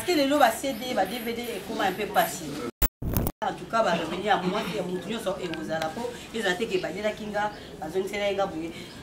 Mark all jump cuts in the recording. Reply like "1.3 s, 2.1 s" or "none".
3.0 s